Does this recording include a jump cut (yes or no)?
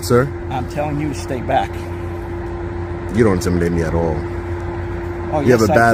no